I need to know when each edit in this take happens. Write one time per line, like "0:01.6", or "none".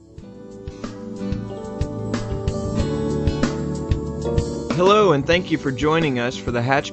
0:04.8